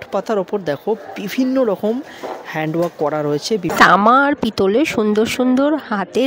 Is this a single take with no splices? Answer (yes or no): no